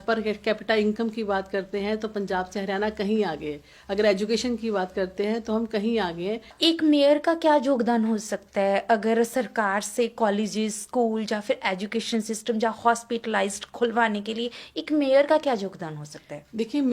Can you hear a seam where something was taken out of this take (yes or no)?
yes